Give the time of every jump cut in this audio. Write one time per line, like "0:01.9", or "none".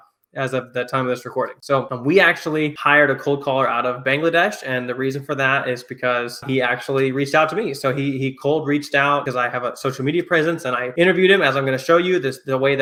none